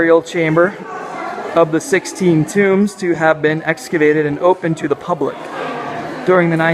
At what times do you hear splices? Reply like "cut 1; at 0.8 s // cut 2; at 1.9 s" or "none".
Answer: cut 1; at 2.5 s